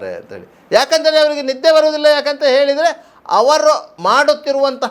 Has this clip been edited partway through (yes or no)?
yes